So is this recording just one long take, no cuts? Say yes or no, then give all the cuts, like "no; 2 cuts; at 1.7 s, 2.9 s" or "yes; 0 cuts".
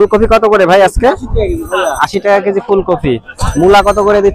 yes; 0 cuts